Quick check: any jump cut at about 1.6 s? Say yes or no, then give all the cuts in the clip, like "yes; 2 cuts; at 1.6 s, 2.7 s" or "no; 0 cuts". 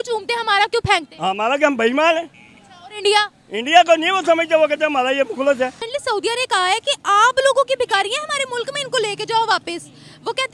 no; 1 cut; at 5.9 s